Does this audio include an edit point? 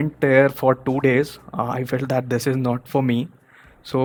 no; 0 cuts

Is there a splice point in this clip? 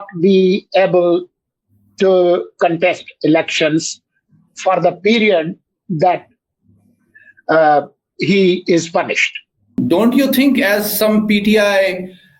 yes; 1 cut; at 9.8 s

